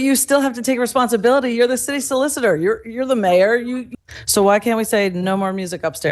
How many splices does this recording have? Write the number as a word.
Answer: one